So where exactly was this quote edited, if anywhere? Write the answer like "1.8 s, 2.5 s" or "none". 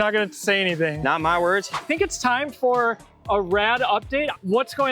1.8 s